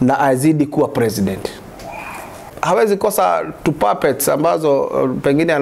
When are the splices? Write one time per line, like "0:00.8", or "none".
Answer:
0:02.5